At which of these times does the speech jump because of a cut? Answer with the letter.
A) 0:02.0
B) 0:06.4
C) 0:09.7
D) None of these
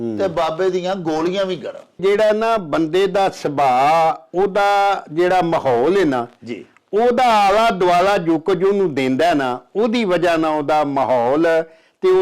A